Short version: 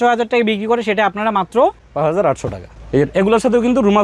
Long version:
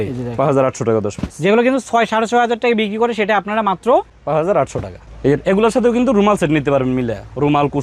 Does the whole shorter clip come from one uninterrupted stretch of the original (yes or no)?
yes